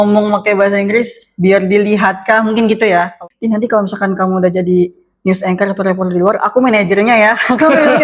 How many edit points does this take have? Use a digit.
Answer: 1